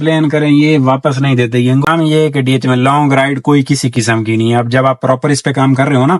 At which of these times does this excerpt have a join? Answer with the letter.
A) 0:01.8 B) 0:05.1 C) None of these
A